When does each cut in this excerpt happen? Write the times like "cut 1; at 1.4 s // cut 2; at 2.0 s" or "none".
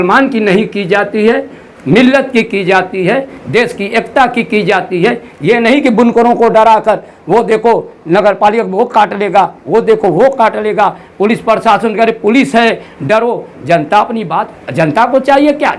none